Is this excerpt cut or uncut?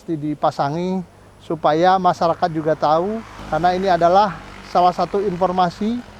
cut